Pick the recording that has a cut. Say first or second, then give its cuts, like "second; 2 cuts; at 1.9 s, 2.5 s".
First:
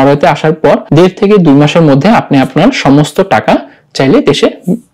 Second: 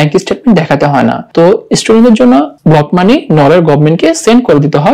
second; 2 cuts; at 1.2 s, 2.5 s